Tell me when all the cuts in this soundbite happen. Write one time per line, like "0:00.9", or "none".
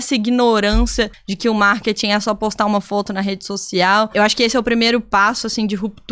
0:01.2
0:04.1

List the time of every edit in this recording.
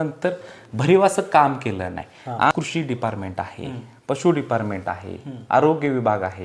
0:02.5

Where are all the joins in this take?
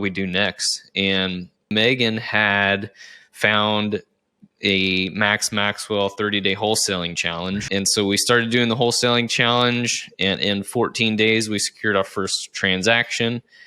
0:01.7
0:07.7

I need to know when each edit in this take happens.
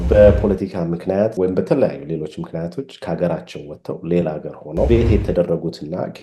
0:01.3
0:04.9

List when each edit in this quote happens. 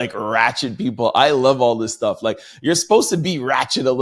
0:02.5

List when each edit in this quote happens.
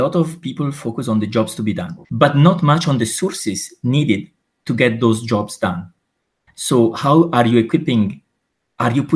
0:01.9

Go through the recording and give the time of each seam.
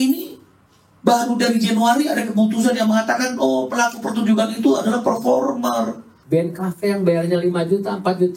0:06.1

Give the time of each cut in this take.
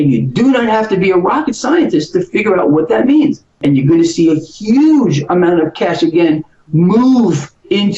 0:03.5

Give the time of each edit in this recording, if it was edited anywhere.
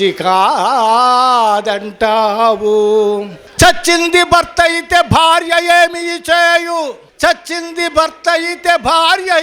0:03.4
0:07.0

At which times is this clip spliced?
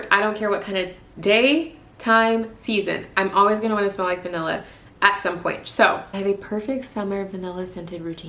0:05.6

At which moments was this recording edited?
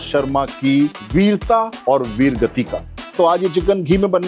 0:01.4
0:03.1

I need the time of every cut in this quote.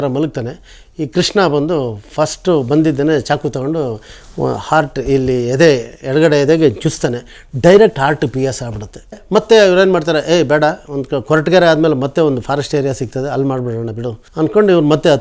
0:09.1
0:14.2

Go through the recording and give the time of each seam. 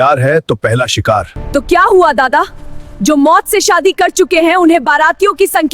0:01.4

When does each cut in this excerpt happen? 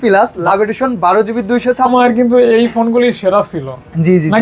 0:01.9

